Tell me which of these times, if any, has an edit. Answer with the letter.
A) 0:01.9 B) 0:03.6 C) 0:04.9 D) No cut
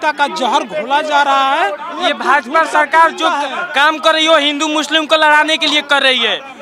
A